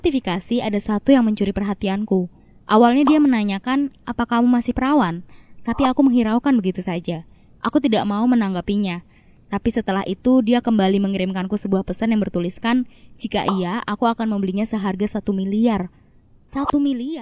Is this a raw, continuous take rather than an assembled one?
yes; 0 cuts

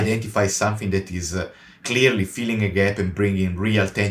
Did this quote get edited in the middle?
yes; 1 cut; at 1.8 s

